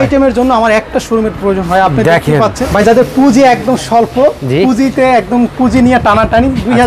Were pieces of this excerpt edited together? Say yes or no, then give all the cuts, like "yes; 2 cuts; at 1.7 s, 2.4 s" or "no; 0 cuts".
yes; 1 cut; at 2.8 s